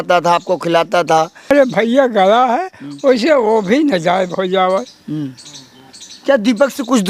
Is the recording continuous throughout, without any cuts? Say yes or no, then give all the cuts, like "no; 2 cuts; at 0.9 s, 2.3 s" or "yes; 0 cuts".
no; 1 cut; at 1.5 s